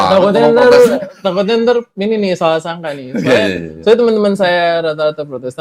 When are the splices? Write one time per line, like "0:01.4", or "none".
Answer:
0:03.3